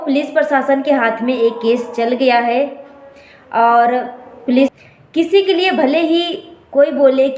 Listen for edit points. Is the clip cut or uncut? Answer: cut